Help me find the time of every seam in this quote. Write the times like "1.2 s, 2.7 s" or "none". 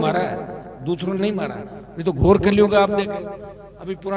none